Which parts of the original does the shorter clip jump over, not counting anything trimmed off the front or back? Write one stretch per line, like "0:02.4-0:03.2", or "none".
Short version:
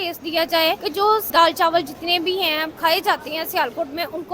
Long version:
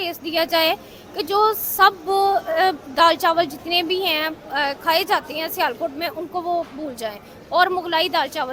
0:01.2-0:02.8
0:04.4-0:04.8